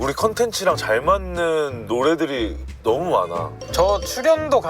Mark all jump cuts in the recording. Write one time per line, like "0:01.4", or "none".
0:03.6